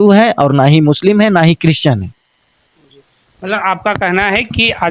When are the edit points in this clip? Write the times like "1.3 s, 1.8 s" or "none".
none